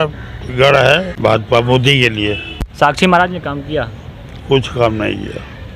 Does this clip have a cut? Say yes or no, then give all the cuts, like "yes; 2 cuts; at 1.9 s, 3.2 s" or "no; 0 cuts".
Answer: yes; 2 cuts; at 1.1 s, 2.7 s